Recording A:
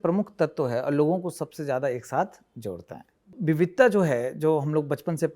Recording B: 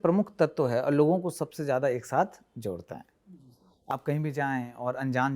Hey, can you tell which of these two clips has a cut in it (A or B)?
A